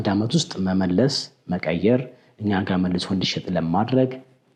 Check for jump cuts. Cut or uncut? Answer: uncut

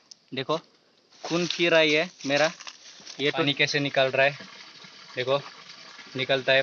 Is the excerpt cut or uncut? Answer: cut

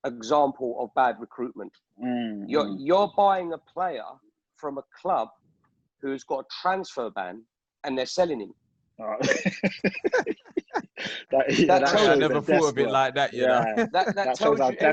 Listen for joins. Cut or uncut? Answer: uncut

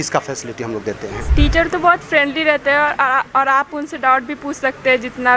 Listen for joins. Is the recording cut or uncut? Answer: cut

